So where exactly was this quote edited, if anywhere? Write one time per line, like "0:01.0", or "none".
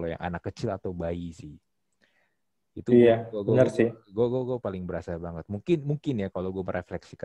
none